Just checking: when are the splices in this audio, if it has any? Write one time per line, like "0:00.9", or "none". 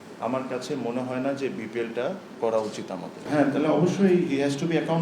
0:03.2